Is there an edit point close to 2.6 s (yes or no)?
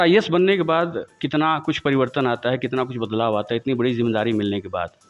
no